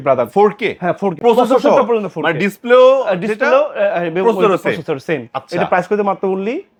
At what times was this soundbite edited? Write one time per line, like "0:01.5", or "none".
none

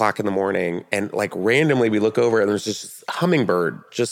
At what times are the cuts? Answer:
none

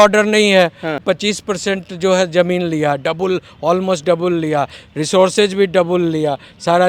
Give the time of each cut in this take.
0:01.0

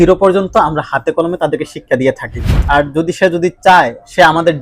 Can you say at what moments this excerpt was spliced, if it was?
0:02.6

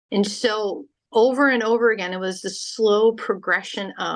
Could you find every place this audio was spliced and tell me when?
0:00.9

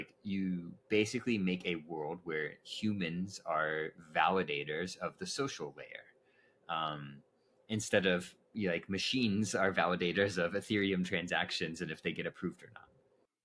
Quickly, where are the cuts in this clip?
none

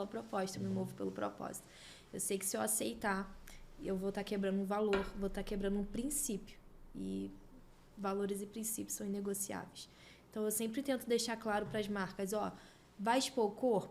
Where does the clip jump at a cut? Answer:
none

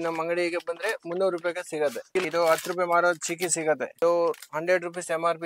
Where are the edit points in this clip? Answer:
0:02.2
0:03.9

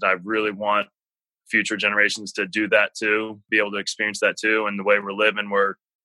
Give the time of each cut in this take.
0:03.5

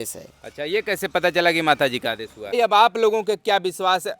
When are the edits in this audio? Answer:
0:02.5

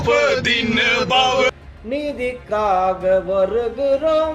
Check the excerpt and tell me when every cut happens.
0:01.5

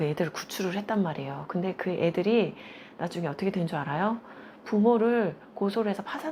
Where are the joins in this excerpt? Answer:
none

